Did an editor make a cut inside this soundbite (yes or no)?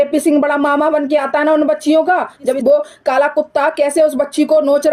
yes